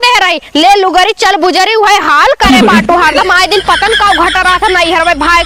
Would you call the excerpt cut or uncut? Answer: uncut